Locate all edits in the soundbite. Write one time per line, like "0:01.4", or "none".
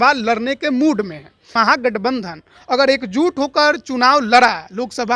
0:01.5